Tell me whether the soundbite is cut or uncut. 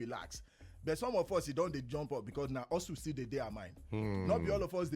uncut